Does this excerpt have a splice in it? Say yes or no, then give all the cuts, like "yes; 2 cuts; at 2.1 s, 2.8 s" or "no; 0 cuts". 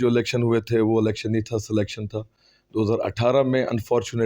no; 0 cuts